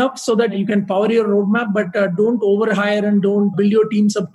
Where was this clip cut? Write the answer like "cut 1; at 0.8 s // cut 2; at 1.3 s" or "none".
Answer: none